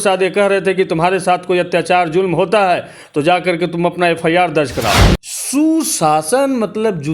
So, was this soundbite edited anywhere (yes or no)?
yes